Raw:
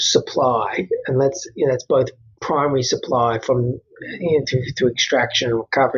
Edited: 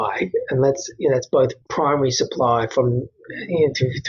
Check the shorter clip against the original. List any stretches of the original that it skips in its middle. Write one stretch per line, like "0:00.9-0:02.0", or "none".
0:02.2-0:02.4